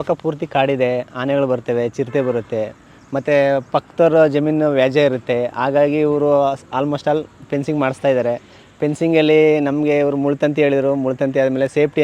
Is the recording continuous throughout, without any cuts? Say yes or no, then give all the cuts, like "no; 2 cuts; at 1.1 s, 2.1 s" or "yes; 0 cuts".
yes; 0 cuts